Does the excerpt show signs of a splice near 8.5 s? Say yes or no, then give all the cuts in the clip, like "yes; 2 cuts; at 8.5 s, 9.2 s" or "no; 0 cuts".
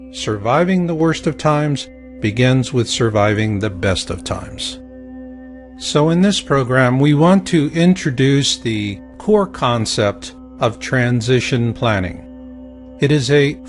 no; 1 cut; at 11.5 s